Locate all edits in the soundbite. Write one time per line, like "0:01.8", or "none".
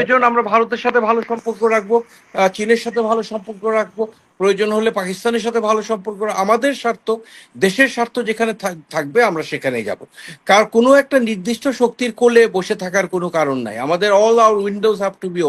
none